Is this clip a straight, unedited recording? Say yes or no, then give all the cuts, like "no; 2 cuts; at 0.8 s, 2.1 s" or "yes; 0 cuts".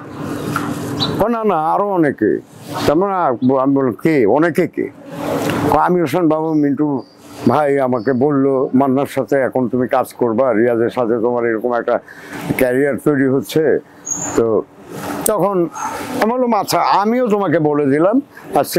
yes; 0 cuts